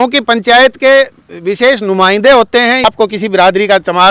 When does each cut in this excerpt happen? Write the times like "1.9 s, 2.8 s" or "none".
2.8 s